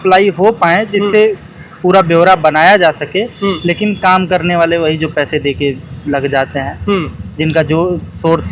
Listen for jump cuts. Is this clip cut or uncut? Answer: uncut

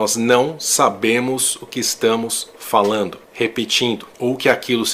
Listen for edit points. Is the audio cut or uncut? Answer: cut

